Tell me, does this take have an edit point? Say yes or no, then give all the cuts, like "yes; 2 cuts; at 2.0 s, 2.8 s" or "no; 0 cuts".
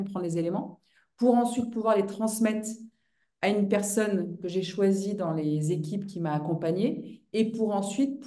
no; 0 cuts